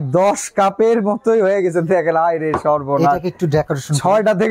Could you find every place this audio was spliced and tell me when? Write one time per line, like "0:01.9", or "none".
none